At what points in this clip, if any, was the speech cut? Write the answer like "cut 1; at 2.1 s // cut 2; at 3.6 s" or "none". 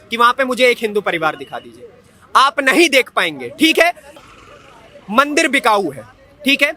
cut 1; at 4.1 s